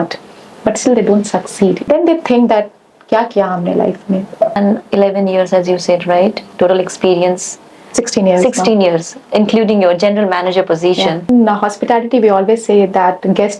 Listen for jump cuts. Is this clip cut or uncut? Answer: cut